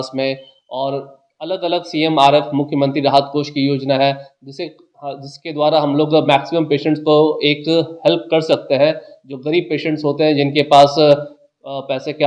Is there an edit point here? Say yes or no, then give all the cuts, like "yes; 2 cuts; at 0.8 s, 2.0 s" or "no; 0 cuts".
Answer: no; 0 cuts